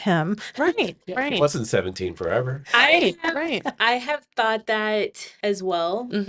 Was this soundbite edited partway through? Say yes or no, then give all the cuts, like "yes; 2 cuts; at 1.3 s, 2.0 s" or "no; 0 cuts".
yes; 1 cut; at 4.9 s